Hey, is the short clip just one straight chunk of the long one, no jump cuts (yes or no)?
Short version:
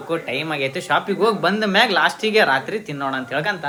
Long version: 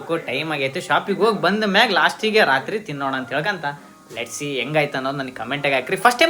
yes